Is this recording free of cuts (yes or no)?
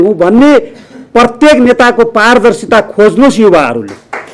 yes